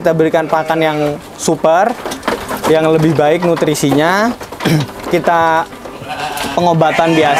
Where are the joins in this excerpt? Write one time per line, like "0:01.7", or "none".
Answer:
none